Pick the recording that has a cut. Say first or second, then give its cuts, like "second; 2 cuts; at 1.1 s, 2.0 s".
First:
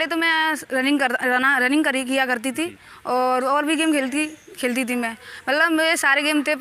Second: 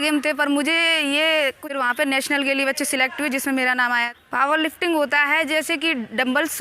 second; 2 cuts; at 1.6 s, 4.1 s